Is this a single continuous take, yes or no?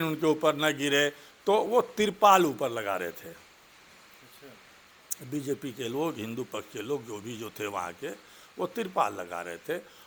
yes